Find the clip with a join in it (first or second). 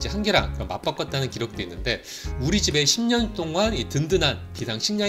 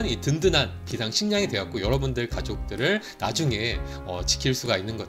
first